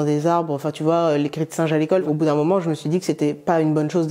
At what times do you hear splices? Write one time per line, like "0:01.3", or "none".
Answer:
0:02.0

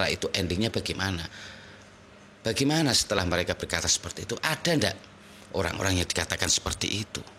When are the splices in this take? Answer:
none

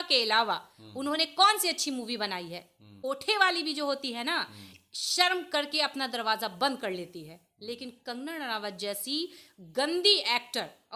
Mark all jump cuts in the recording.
0:02.9

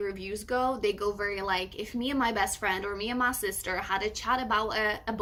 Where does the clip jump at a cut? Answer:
none

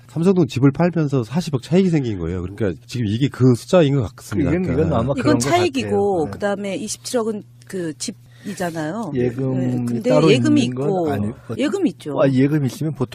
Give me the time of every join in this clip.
none

